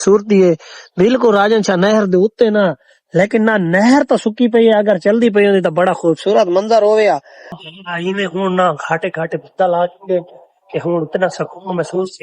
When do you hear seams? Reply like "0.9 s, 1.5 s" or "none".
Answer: 7.6 s